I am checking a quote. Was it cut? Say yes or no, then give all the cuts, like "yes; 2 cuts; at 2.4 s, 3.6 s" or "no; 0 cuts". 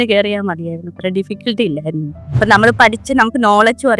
yes; 1 cut; at 2.2 s